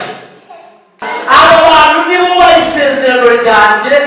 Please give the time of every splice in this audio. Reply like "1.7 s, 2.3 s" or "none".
1.1 s

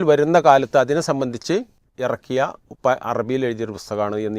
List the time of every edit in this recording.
1.8 s

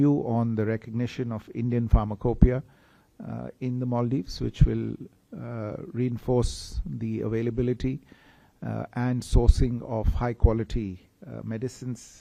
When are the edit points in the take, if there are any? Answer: none

